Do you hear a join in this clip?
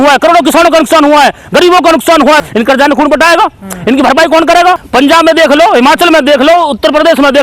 yes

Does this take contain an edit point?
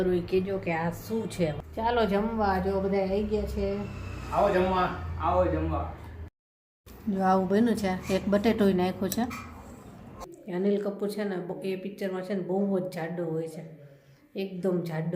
yes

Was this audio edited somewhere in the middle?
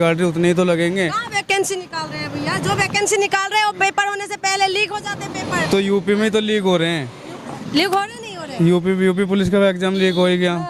no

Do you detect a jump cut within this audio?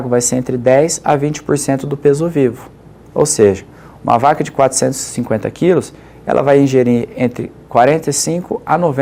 no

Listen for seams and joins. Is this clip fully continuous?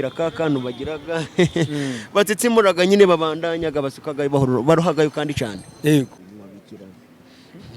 no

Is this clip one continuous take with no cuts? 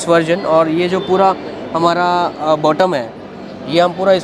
yes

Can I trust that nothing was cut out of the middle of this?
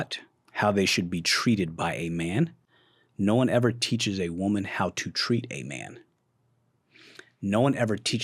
yes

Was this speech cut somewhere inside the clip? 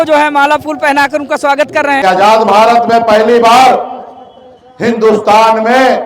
yes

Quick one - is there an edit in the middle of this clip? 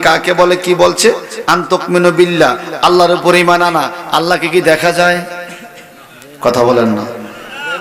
no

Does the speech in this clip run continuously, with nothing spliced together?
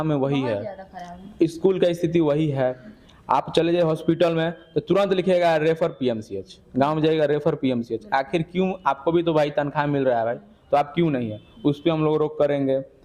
yes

